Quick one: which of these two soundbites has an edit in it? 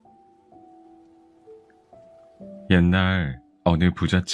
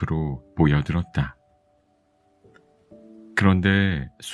second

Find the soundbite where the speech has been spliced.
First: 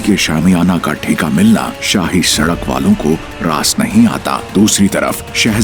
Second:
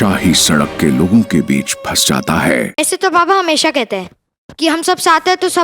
second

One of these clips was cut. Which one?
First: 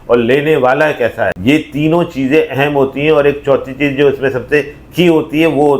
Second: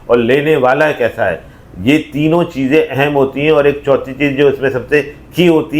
first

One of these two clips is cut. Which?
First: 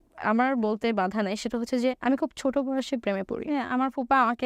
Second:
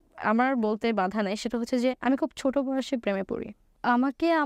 first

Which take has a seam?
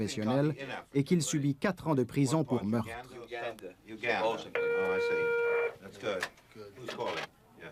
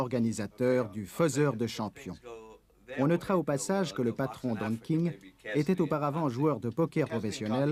first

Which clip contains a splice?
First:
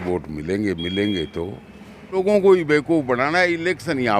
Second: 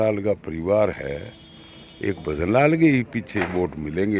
first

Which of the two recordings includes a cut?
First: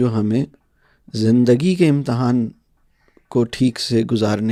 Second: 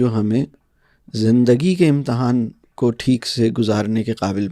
second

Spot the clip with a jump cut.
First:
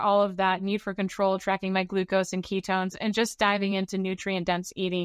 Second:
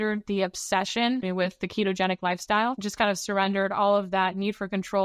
second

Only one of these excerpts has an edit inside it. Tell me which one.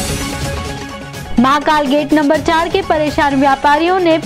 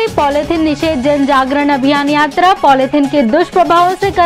first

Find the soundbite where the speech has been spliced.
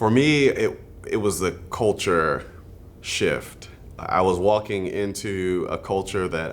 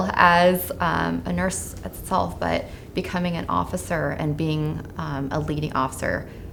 first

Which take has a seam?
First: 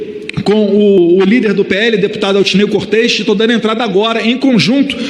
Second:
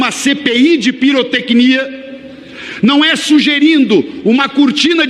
first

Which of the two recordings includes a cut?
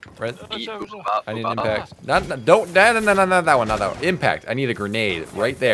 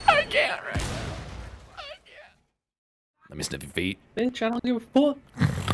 second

